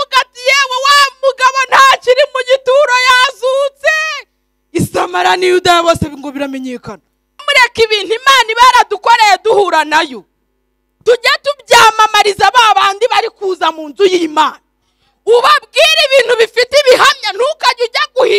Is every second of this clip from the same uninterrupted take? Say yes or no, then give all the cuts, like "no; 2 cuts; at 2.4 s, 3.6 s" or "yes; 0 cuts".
no; 1 cut; at 7.4 s